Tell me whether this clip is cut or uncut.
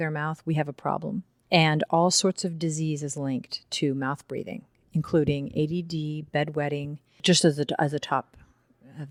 uncut